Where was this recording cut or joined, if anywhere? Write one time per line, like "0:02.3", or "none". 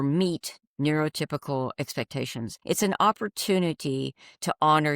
0:02.5